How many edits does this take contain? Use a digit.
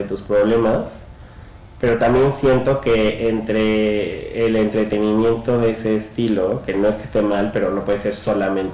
0